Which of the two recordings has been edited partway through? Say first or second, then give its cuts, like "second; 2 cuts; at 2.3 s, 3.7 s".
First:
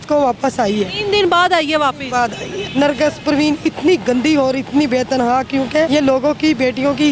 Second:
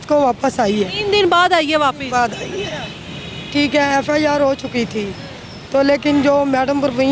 first; 2 cuts; at 2.6 s, 5.9 s